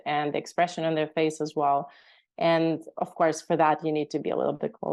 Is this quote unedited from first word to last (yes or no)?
yes